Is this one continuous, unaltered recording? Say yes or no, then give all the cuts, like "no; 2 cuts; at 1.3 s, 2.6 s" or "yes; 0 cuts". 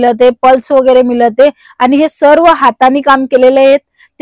yes; 0 cuts